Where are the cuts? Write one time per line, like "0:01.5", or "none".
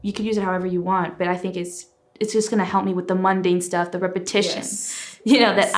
none